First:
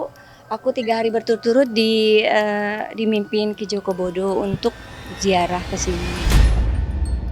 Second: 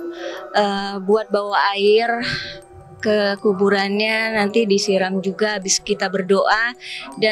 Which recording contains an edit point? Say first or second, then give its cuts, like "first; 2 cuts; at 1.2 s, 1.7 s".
first; 1 cut; at 6.2 s